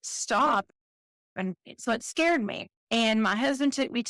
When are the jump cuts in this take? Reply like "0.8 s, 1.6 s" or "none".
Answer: none